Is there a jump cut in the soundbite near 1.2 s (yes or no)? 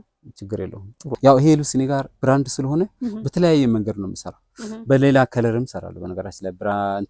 yes